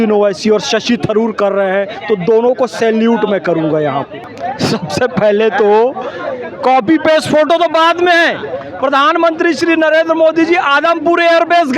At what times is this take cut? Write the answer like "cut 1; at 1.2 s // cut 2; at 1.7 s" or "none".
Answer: cut 1; at 4.2 s